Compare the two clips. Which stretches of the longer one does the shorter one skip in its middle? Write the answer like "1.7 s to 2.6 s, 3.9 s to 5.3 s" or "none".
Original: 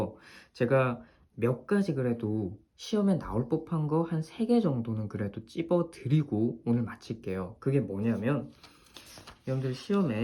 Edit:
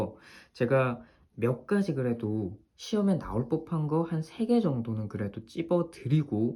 none